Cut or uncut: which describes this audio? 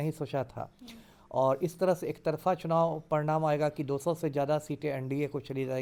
uncut